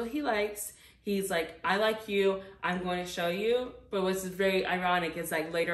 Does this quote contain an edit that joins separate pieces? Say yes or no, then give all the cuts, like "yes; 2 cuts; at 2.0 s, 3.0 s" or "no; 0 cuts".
no; 0 cuts